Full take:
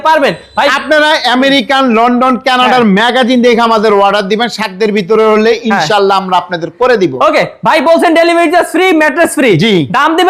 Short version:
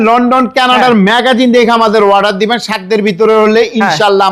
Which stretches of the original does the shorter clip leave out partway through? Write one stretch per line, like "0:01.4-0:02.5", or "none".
none